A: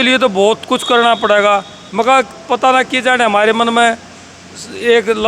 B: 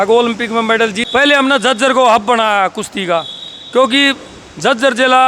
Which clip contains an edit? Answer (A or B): B